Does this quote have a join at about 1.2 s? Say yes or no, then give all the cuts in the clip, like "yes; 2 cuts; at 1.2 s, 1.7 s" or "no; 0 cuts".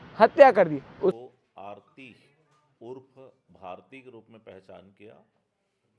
yes; 1 cut; at 1.2 s